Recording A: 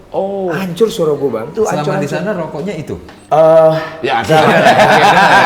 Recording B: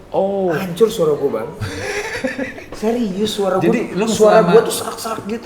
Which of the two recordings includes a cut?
A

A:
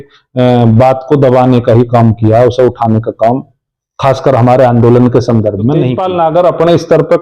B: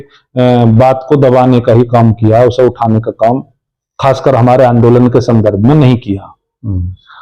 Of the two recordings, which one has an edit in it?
A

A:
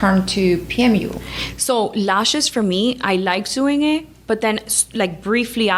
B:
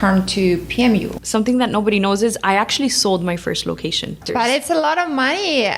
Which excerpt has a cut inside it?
B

